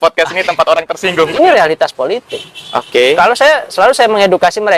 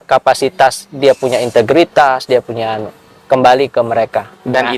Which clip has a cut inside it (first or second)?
first